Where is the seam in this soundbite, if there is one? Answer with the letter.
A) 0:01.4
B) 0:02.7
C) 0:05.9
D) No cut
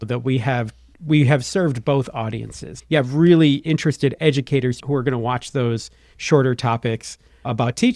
B